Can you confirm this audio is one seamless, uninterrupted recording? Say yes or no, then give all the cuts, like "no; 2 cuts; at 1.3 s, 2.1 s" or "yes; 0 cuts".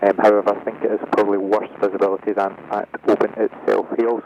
yes; 0 cuts